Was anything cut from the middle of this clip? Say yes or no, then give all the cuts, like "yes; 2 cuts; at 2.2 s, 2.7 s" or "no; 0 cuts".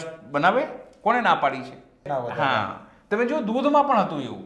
yes; 1 cut; at 2.0 s